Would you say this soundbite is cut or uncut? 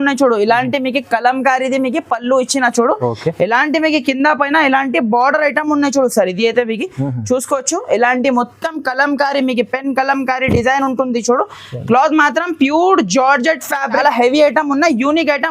cut